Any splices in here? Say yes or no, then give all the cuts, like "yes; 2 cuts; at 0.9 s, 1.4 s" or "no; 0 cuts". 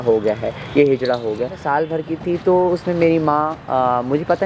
yes; 1 cut; at 1.6 s